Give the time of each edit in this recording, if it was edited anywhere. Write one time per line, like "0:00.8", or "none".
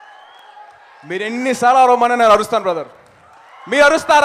0:01.8